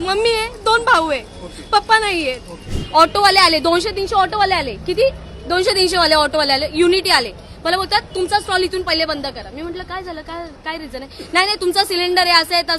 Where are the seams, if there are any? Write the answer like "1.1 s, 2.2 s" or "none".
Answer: 2.8 s